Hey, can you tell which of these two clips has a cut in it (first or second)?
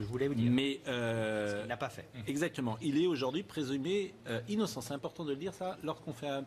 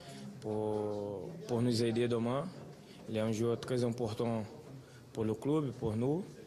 first